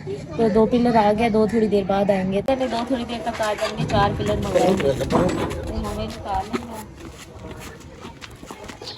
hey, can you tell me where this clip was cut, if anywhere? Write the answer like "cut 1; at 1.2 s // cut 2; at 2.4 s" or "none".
cut 1; at 2.4 s